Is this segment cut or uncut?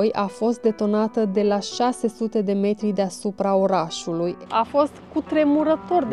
cut